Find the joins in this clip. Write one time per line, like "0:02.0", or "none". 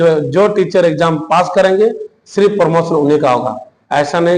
none

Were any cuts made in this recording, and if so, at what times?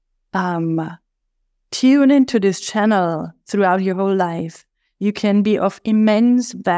none

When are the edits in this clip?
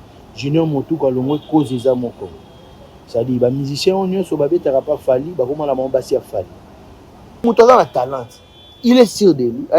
0:07.4

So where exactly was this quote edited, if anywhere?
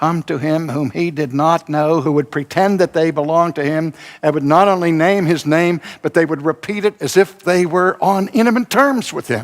0:02.0

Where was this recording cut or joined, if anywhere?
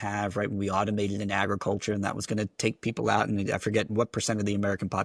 none

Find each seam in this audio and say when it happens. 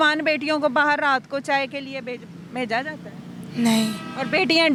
none

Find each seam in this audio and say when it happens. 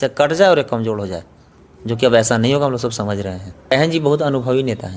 0:03.7

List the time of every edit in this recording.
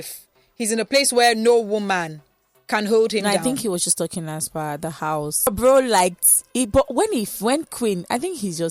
0:05.5

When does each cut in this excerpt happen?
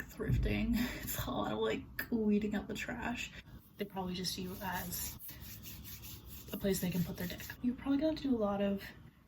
0:03.6
0:07.6

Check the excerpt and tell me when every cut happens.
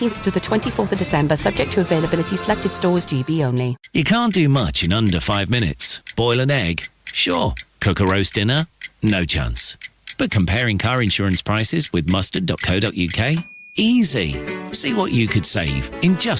0:03.8

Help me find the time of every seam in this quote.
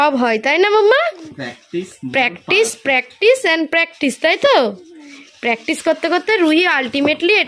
none

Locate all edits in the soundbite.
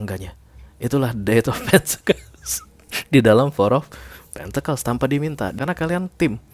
0:05.5

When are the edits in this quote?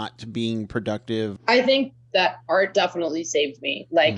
0:01.3

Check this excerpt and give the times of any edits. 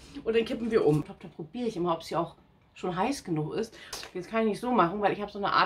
0:01.0
0:04.0

